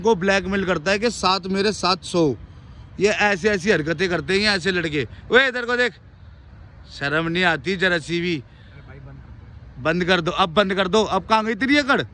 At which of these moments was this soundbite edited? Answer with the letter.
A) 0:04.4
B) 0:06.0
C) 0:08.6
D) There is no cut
D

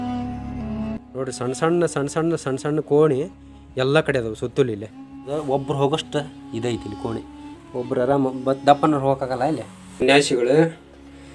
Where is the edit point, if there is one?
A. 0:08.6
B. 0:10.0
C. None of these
B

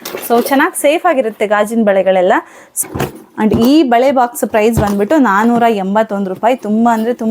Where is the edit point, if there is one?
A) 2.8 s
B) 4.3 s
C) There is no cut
A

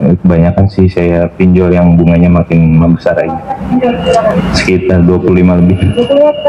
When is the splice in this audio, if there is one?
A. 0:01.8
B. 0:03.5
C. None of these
B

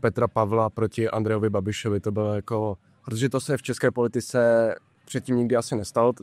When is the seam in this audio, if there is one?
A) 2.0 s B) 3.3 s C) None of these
C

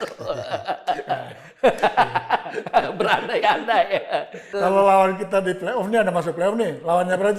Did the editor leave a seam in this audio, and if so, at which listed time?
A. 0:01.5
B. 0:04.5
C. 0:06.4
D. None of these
B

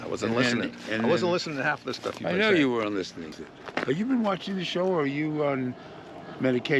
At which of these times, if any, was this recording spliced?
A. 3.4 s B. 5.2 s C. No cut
A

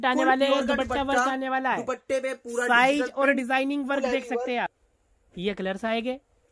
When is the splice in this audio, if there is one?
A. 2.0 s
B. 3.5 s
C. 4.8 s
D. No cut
C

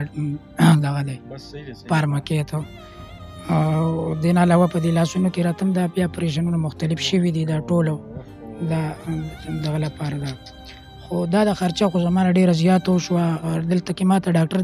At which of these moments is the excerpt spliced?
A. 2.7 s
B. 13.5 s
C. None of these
B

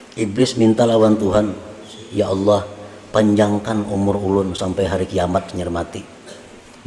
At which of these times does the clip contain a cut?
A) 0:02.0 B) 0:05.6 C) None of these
A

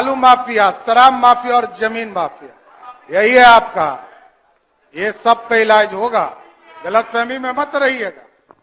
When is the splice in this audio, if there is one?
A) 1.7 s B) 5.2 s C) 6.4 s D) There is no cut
D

